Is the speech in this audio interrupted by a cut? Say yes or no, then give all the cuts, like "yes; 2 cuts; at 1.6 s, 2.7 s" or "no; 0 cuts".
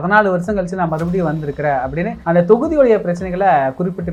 no; 0 cuts